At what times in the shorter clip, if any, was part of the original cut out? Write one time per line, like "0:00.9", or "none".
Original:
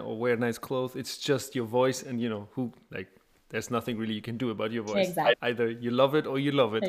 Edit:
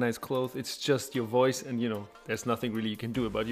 0:02.1